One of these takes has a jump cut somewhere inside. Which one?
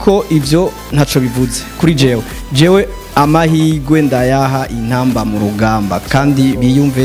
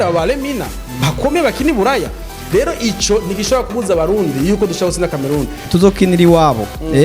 second; 1 cut; at 5.6 s

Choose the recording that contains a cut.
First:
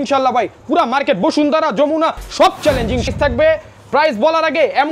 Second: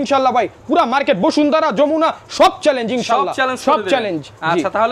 first; 1 cut; at 3.1 s

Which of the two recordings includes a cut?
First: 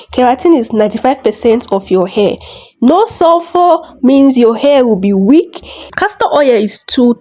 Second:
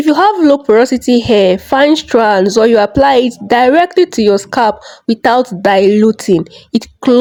first; 1 cut; at 6.0 s

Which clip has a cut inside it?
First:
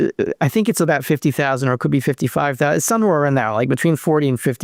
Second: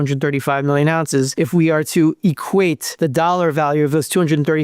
second; 2 cuts; at 1.3 s, 2.9 s

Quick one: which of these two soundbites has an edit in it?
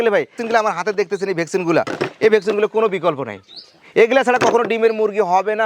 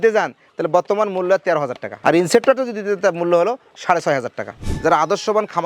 second; 1 cut; at 4.6 s

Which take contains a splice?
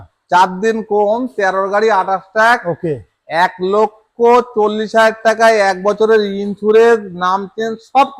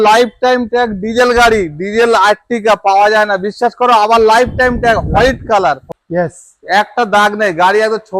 second; 1 cut; at 5.9 s

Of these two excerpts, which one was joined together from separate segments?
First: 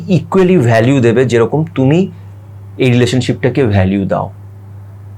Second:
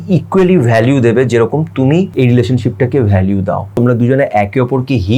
second; 2 cuts; at 2.1 s, 3.8 s

